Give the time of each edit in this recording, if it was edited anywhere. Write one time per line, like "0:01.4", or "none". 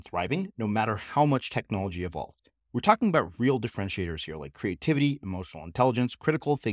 none